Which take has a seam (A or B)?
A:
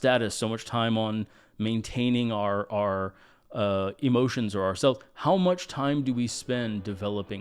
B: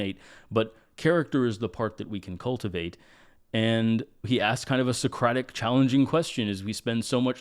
B